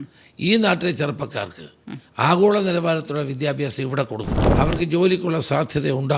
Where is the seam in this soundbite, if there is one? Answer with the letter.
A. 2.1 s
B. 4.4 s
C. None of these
B